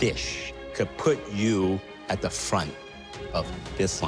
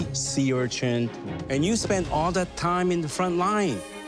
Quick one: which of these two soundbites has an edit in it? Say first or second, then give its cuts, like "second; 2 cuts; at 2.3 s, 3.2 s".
second; 1 cut; at 1.2 s